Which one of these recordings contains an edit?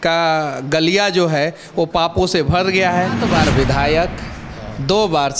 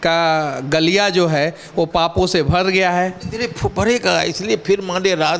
first; 1 cut; at 3.2 s

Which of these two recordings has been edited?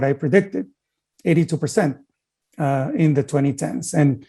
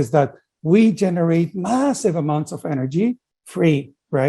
second; 1 cut; at 3.3 s

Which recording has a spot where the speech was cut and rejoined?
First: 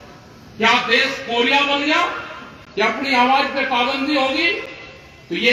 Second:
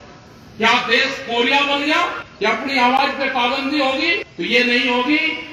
second; 2 cuts; at 2.2 s, 4.3 s

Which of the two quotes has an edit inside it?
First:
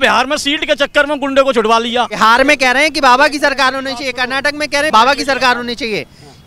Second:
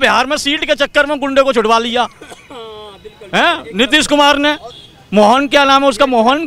first; 2 cuts; at 2.2 s, 4.9 s

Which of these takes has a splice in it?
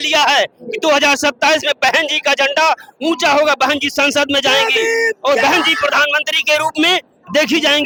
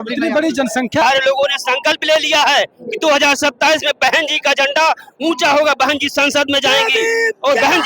second; 1 cut; at 1.0 s

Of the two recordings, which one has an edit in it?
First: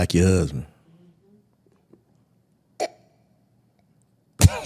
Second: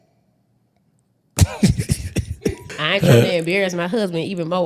second; 1 cut; at 2.6 s

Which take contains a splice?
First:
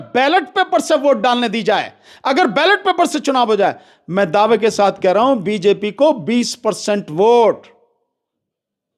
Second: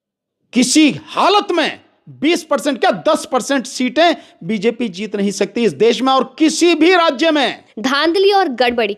second; 1 cut; at 7.7 s

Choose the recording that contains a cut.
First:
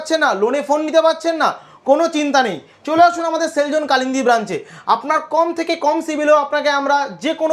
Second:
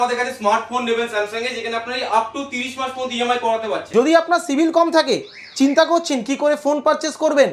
second; 1 cut; at 3.8 s

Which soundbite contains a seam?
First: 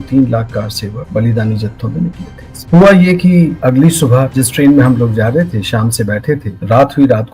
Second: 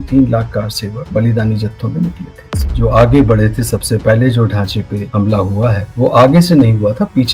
second; 1 cut; at 2.6 s

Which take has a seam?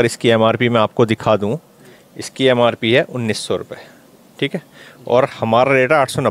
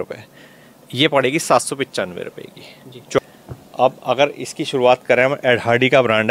second; 1 cut; at 3.2 s

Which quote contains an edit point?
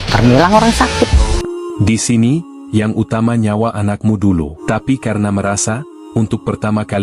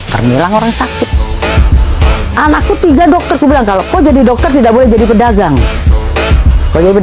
first; 2 cuts; at 1.3 s, 4.6 s

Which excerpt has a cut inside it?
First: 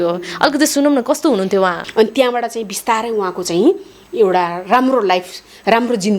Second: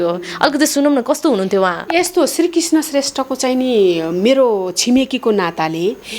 first; 1 cut; at 1.8 s

